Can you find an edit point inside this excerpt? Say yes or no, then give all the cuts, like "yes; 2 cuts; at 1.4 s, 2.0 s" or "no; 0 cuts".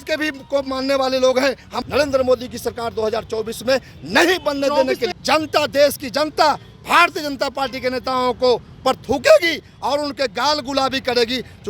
yes; 2 cuts; at 1.7 s, 5.2 s